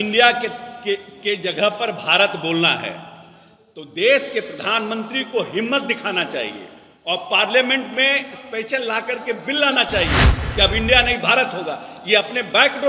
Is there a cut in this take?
no; 0 cuts

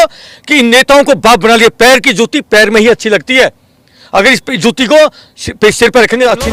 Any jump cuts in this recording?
no; 0 cuts

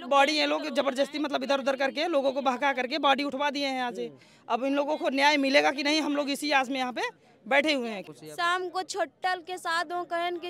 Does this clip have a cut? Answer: yes; 1 cut; at 8.0 s

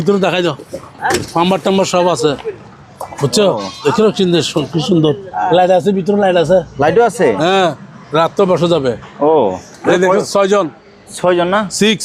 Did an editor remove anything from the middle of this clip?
no; 0 cuts

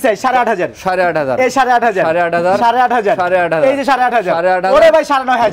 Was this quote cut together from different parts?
no; 0 cuts

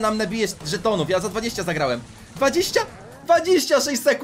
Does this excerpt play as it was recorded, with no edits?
yes; 0 cuts

